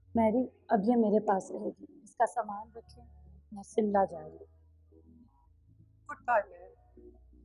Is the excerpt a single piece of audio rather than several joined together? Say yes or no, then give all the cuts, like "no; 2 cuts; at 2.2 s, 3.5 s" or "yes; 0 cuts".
yes; 0 cuts